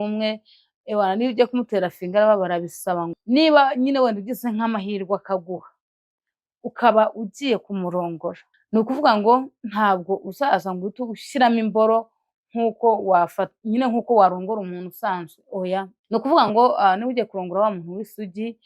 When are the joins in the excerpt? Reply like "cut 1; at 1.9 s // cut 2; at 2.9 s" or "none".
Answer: cut 1; at 3.1 s // cut 2; at 8.5 s // cut 3; at 16.0 s